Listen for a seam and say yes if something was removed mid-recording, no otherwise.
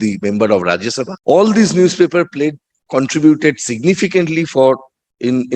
yes